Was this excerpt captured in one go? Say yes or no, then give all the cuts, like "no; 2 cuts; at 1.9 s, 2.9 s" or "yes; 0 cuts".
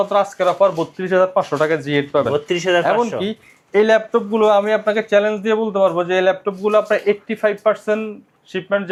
yes; 0 cuts